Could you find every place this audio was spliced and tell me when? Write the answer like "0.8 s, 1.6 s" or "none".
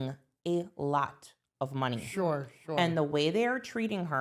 none